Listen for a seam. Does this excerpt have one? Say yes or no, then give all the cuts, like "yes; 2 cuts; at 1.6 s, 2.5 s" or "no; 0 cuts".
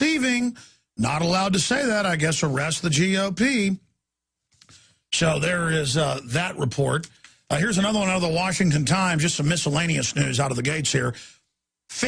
no; 0 cuts